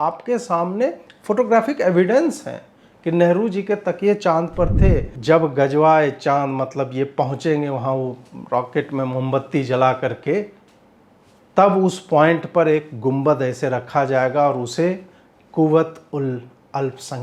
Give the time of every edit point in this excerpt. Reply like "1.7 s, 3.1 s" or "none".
5.1 s